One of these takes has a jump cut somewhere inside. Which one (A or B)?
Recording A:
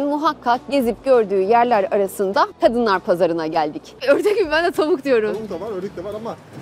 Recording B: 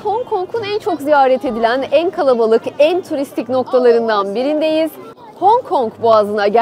A